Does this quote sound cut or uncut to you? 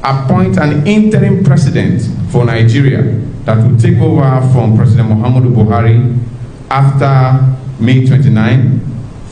uncut